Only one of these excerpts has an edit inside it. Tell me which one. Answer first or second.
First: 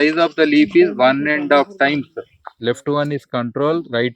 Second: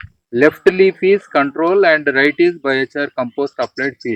first